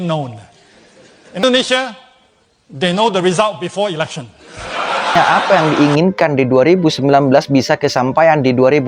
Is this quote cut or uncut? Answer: cut